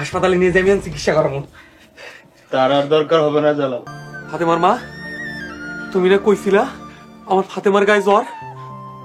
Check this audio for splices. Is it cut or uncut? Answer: cut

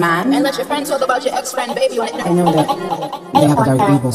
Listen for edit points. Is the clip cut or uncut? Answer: uncut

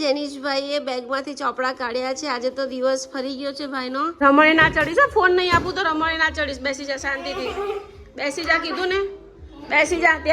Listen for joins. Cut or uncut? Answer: cut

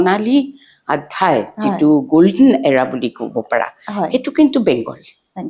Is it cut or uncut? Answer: uncut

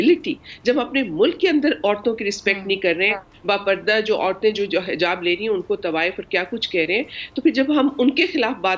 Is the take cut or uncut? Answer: uncut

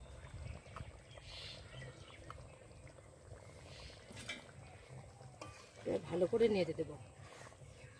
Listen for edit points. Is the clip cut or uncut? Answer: uncut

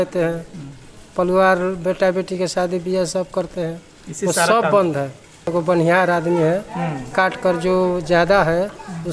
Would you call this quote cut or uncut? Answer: cut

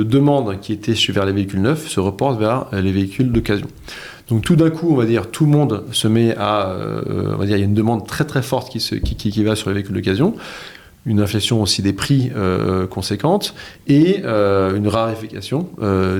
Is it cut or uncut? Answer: uncut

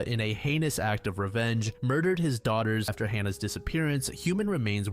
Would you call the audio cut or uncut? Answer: cut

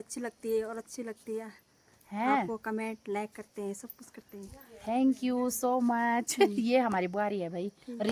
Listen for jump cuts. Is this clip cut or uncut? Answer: uncut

